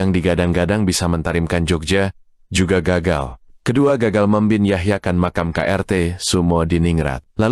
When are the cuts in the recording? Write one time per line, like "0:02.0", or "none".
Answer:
0:03.5